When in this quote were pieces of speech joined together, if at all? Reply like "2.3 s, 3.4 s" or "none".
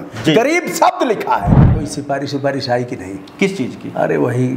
1.7 s